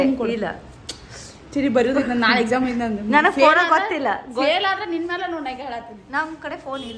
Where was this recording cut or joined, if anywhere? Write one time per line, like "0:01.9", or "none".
0:06.0